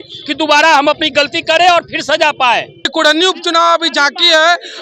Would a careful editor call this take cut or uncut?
cut